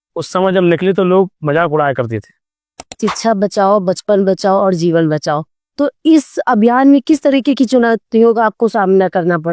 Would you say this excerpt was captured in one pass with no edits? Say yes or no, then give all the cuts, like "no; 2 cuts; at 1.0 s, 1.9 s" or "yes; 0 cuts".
no; 1 cut; at 3.0 s